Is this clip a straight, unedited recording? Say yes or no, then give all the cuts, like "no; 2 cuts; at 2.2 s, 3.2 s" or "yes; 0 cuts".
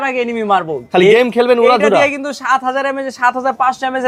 yes; 0 cuts